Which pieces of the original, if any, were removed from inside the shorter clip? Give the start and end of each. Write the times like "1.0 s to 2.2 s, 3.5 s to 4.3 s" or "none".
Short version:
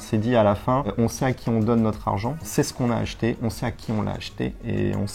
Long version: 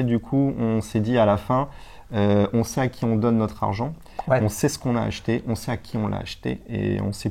1.7 s to 2.5 s, 4.0 s to 4.5 s